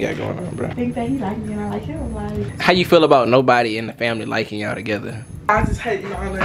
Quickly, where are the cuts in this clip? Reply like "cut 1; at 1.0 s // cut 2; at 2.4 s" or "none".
cut 1; at 0.7 s // cut 2; at 2.4 s // cut 3; at 5.5 s